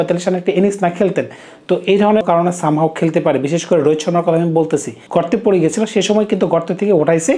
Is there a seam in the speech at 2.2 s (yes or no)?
yes